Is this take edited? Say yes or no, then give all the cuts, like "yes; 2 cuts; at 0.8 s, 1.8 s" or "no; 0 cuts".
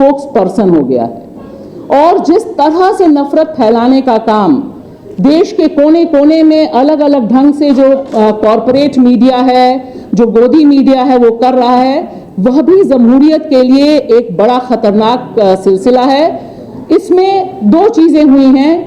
no; 0 cuts